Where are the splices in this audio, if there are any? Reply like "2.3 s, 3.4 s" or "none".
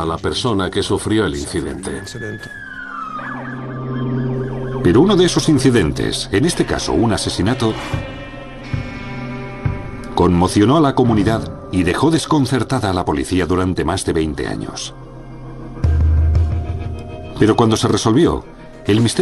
14.6 s

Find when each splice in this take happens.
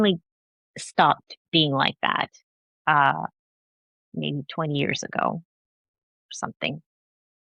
none

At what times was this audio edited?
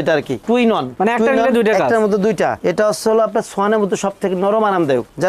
2.6 s

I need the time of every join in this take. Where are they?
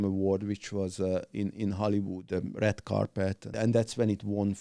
2.2 s, 3.6 s

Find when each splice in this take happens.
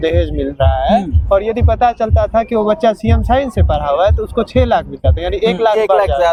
none

